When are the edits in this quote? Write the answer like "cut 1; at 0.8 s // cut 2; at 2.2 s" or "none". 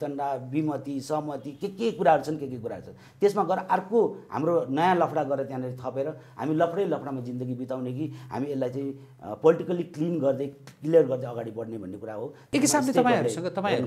cut 1; at 12.5 s